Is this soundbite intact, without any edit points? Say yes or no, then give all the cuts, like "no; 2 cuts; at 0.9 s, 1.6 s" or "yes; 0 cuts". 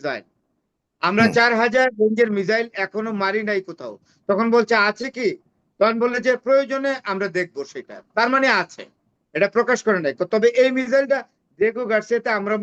yes; 0 cuts